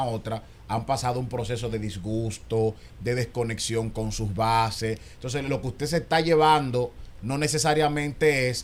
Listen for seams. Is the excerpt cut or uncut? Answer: uncut